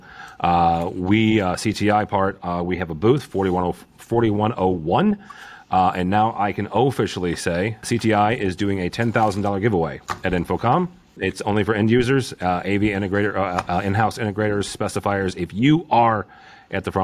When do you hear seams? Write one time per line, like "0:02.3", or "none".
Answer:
0:07.8
0:11.1